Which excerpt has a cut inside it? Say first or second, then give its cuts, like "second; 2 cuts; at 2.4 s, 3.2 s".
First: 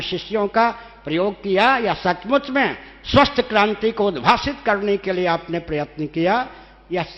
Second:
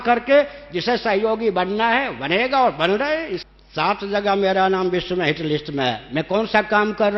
second; 1 cut; at 3.4 s